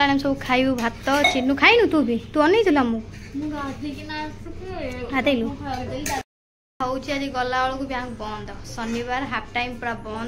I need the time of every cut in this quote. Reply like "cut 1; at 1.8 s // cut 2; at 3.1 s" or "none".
none